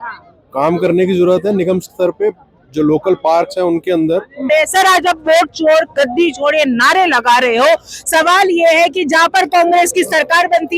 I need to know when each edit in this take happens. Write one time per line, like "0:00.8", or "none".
0:04.4